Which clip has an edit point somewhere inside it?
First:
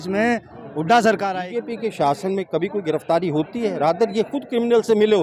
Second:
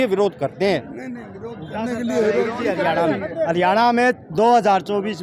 first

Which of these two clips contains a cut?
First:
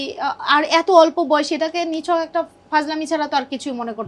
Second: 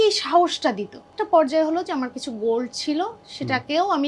second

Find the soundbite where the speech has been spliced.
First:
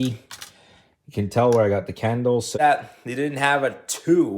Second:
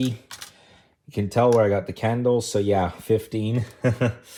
first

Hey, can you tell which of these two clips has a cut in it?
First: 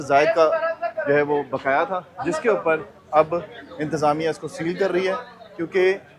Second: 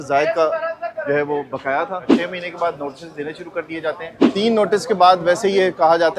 second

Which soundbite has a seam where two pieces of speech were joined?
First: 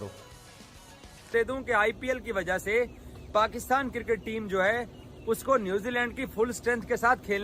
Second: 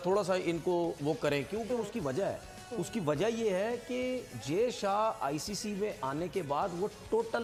first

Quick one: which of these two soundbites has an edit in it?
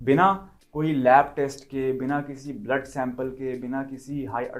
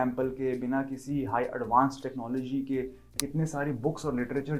second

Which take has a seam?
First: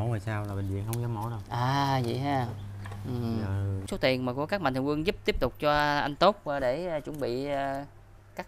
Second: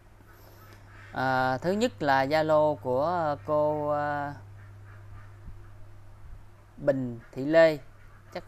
first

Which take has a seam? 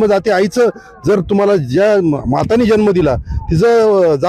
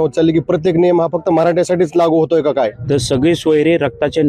second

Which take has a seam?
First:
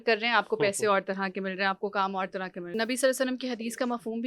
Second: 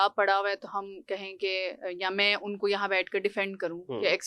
first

